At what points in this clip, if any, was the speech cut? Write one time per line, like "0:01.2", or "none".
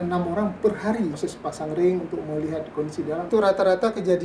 0:01.2
0:03.3

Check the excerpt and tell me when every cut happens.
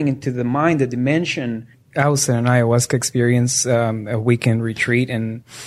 0:01.8

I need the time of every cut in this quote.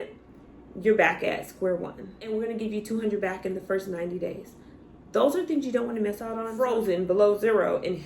0:02.2
0:06.5

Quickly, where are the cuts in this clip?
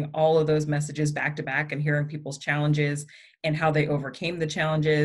none

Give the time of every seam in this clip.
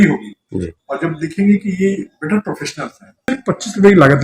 0:03.3

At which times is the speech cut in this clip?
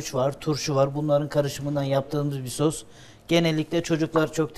none

